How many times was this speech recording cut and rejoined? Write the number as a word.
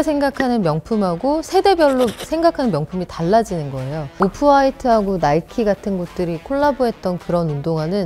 one